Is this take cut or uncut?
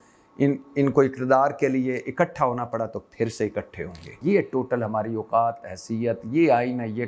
cut